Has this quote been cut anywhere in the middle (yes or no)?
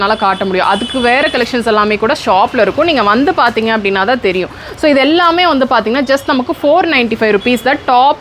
no